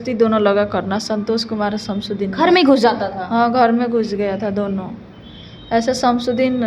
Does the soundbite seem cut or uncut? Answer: uncut